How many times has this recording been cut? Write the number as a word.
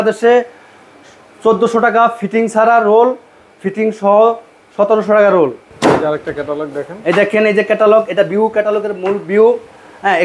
one